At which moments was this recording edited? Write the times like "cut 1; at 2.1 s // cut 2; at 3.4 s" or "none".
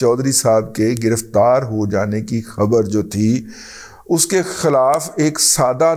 none